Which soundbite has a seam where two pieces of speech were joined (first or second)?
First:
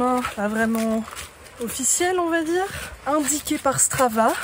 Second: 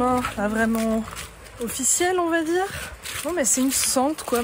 first